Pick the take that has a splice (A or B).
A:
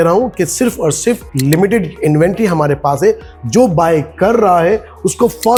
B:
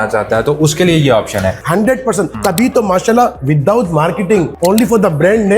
B